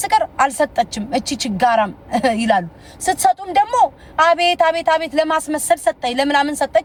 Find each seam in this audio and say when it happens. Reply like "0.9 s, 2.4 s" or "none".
none